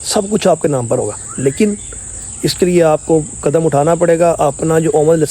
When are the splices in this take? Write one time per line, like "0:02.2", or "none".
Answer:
none